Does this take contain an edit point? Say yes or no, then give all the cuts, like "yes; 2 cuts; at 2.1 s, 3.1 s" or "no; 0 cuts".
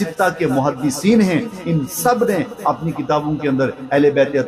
no; 0 cuts